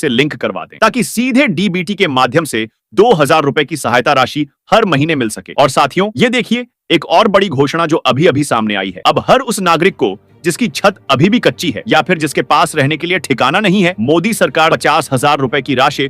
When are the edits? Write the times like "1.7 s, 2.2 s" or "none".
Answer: 14.7 s